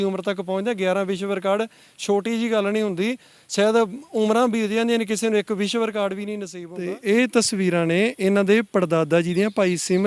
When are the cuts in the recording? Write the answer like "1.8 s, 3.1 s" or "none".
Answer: 6.5 s